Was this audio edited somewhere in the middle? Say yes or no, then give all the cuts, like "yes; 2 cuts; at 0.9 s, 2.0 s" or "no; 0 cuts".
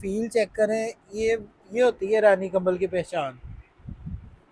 no; 0 cuts